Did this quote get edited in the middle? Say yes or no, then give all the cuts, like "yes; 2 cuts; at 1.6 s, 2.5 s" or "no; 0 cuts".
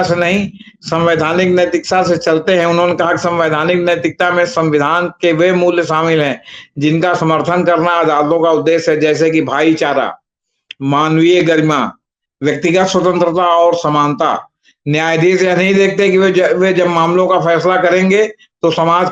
no; 0 cuts